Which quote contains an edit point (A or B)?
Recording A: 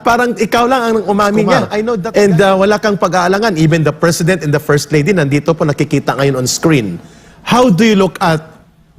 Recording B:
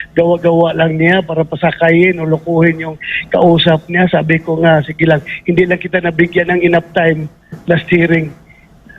A